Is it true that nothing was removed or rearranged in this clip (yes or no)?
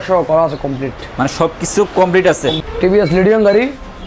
no